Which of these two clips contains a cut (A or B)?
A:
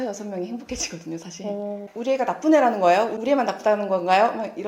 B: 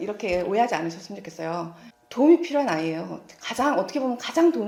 A